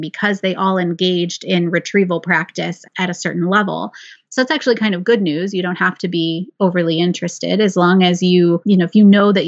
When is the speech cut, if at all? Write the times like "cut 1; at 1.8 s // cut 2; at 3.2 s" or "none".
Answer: cut 1; at 2.8 s // cut 2; at 8.6 s